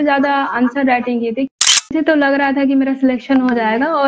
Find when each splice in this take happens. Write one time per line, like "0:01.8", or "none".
0:01.8

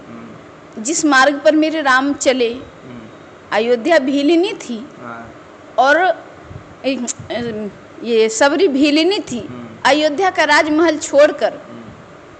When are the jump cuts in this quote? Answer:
none

